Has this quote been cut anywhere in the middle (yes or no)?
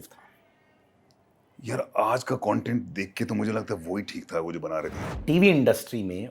yes